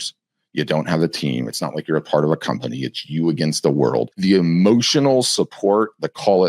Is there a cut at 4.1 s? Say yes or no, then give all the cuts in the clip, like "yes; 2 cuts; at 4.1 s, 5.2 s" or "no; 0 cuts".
yes; 1 cut; at 4.1 s